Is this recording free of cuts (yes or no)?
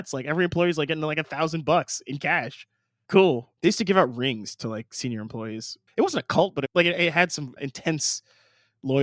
no